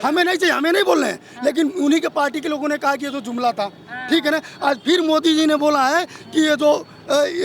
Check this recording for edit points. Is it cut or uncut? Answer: uncut